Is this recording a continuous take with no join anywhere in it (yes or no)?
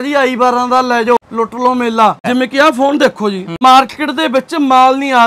no